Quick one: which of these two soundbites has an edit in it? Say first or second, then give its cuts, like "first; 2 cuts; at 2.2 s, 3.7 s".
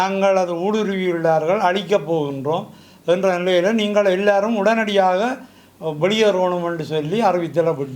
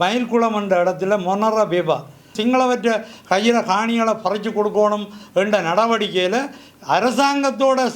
second; 1 cut; at 2.3 s